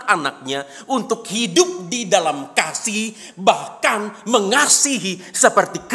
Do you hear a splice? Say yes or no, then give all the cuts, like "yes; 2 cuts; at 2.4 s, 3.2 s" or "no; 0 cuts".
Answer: no; 0 cuts